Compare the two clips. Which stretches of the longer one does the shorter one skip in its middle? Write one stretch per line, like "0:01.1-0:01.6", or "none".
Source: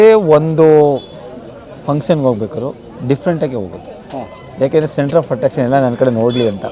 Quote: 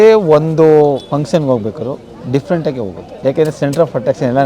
0:01.0-0:01.8
0:03.8-0:04.4